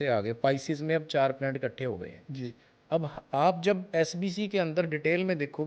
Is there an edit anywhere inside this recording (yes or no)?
no